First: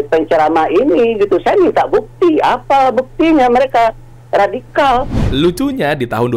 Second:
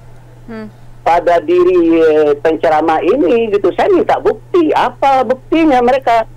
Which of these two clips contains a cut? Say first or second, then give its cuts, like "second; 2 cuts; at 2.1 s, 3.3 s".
first; 1 cut; at 5.2 s